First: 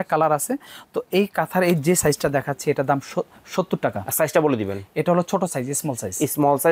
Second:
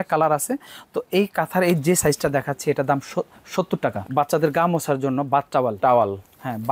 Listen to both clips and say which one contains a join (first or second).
second